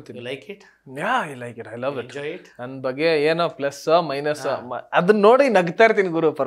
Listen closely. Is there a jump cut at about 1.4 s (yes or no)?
no